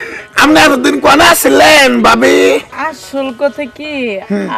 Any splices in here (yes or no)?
yes